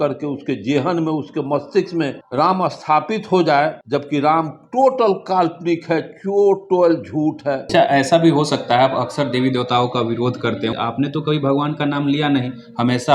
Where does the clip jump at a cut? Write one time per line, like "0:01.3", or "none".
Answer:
0:02.2
0:03.8
0:07.6